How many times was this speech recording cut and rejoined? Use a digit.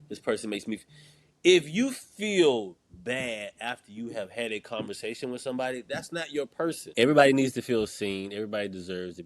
1